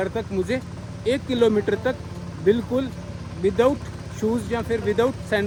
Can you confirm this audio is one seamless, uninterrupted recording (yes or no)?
yes